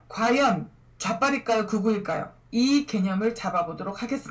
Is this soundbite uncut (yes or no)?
yes